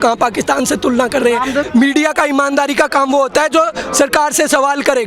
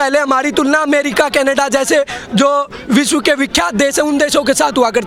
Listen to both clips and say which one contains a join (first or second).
first